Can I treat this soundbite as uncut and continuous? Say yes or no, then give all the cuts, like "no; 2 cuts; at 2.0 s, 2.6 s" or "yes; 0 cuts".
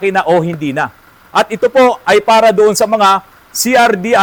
yes; 0 cuts